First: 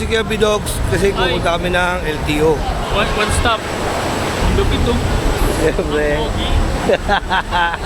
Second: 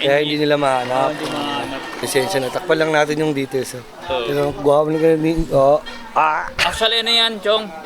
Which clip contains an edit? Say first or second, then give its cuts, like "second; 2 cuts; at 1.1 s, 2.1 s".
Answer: second; 1 cut; at 2.0 s